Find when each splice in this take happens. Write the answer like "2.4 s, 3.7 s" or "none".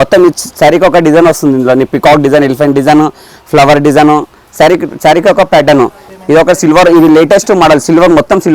6.1 s